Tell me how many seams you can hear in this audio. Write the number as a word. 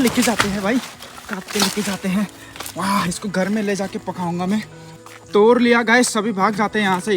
one